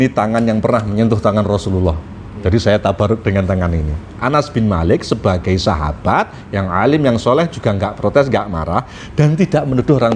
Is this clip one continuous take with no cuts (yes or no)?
yes